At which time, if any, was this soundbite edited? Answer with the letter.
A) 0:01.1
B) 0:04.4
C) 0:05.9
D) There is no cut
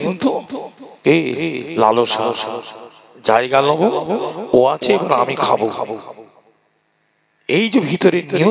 D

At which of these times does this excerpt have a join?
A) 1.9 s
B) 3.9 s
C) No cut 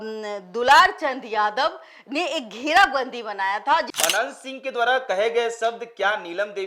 B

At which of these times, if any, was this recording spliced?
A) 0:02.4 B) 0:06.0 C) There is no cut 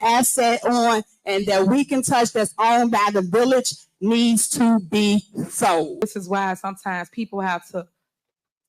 B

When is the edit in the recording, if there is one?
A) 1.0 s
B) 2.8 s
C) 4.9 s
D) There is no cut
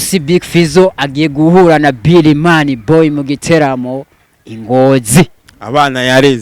D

